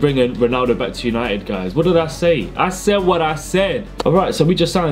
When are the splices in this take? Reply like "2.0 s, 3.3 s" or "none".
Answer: 4.0 s